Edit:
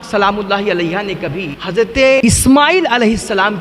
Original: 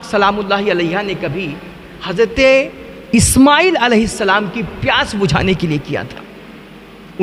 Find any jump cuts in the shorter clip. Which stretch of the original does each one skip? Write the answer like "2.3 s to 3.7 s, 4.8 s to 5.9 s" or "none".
1.5 s to 1.9 s, 2.6 s to 3.1 s